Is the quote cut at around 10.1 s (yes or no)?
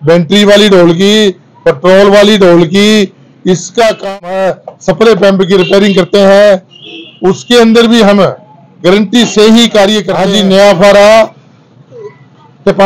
yes